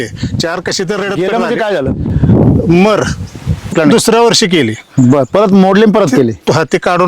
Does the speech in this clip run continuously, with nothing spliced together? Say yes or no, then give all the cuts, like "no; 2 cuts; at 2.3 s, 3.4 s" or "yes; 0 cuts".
no; 1 cut; at 3.7 s